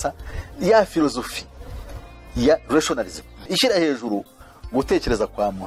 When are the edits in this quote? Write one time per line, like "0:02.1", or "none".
none